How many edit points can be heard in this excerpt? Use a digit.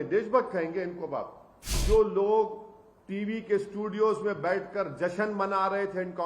1